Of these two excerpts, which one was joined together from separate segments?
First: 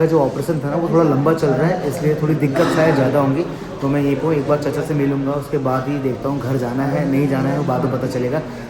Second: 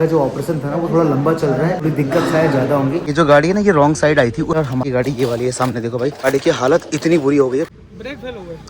second; 5 cuts; at 1.8 s, 3.1 s, 4.6 s, 6.2 s, 7.8 s

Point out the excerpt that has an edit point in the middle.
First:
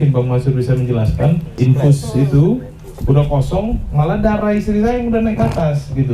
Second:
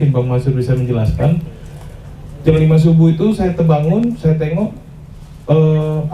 first; 1 cut; at 1.5 s

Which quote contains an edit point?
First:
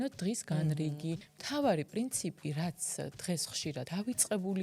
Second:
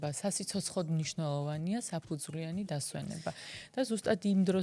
first; 2 cuts; at 1.3 s, 3.9 s

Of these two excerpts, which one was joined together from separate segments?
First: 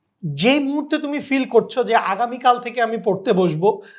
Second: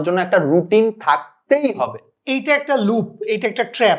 second; 1 cut; at 2.1 s

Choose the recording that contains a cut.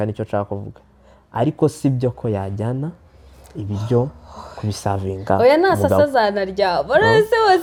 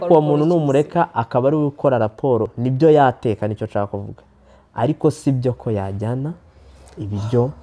second; 1 cut; at 2.5 s

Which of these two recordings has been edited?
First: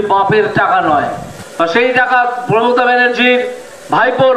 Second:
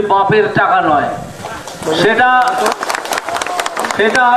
second; 1 cut; at 1.2 s

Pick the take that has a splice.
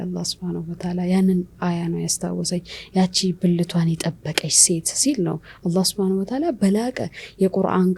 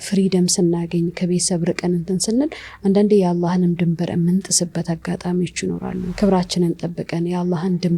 second; 1 cut; at 6.1 s

